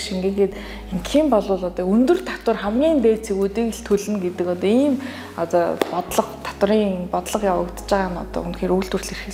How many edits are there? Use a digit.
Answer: 0